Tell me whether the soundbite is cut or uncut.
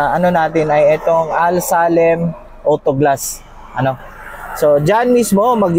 uncut